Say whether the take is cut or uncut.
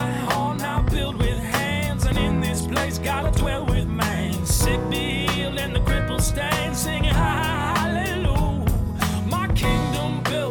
uncut